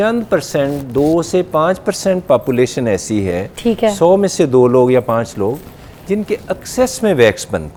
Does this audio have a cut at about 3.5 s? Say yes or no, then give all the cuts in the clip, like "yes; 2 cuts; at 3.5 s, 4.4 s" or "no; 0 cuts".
no; 0 cuts